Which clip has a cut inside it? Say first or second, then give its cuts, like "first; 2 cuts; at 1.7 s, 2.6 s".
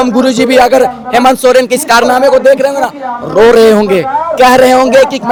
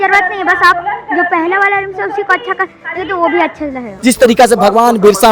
second; 1 cut; at 3.9 s